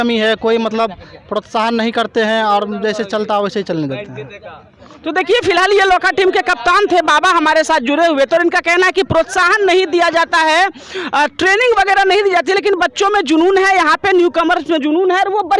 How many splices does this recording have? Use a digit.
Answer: 0